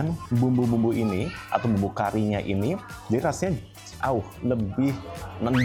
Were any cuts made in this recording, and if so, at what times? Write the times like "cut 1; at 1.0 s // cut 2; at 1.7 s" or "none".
none